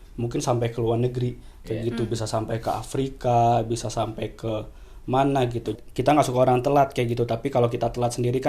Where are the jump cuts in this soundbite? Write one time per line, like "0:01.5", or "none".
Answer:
0:05.7

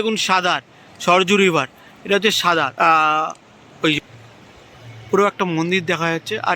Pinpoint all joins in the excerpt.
0:02.7
0:04.0

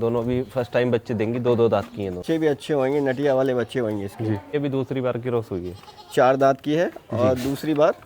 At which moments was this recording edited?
0:02.2
0:04.5

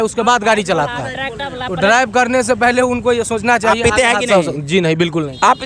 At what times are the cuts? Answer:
none

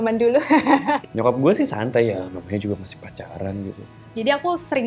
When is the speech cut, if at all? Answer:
0:01.1
0:04.0

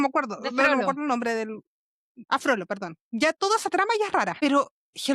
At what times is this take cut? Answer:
0:02.2
0:04.3

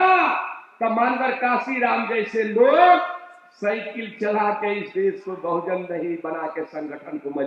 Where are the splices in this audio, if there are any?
none

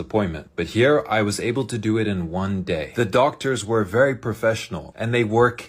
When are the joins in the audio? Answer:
none

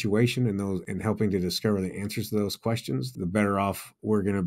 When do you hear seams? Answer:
0:00.9
0:03.1

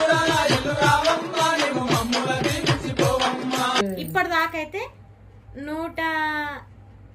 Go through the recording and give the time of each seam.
none

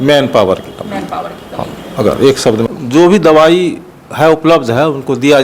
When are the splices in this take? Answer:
0:02.7

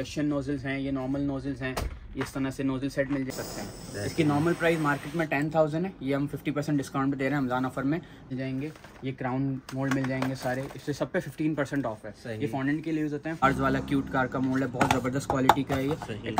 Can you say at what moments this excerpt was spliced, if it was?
0:03.3
0:08.3
0:13.4

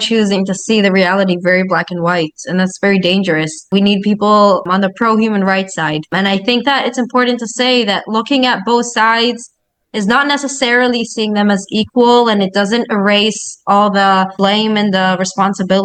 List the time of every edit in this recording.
none

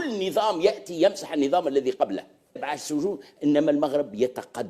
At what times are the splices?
0:02.7

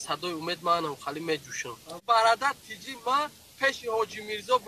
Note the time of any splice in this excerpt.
0:02.0

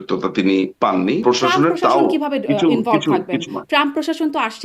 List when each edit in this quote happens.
0:01.2

